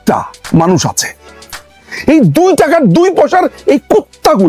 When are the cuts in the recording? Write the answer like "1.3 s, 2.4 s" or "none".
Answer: 1.8 s